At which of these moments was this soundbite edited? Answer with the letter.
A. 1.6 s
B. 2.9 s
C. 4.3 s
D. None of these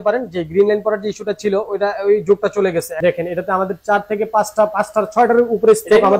B